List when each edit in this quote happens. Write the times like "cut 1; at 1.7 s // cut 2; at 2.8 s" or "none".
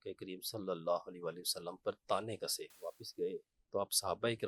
cut 1; at 2.7 s